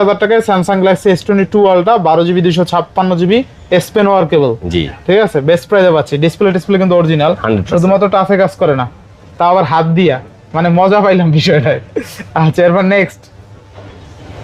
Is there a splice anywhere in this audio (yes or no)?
no